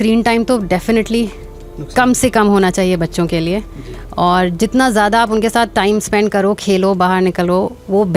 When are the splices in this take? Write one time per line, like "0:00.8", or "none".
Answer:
none